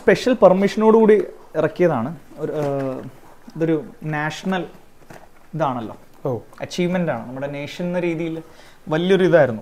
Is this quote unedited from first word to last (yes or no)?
yes